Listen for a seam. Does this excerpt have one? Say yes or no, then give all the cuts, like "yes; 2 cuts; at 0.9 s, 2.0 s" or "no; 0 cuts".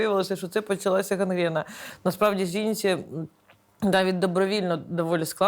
yes; 1 cut; at 1.9 s